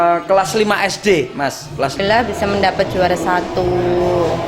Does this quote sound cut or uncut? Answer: cut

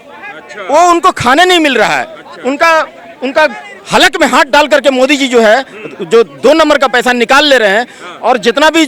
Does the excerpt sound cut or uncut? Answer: uncut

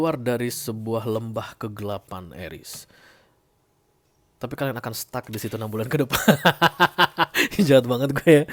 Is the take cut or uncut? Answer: uncut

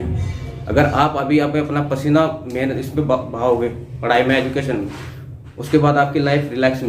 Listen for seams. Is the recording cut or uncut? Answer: uncut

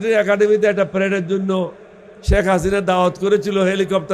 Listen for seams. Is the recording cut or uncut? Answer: uncut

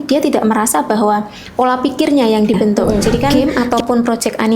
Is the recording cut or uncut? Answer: cut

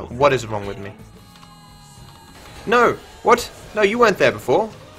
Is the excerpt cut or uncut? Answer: cut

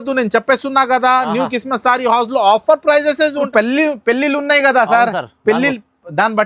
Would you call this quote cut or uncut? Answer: cut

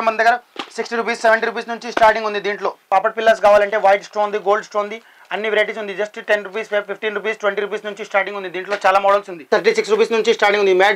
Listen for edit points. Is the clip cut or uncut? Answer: cut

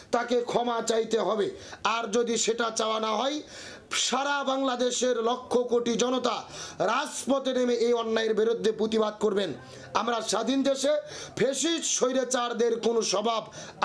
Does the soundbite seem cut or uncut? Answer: uncut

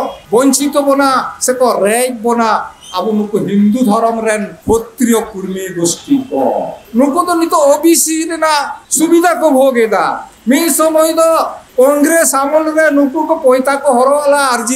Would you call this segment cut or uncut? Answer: uncut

